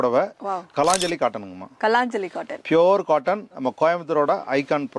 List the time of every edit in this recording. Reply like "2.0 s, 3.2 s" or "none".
none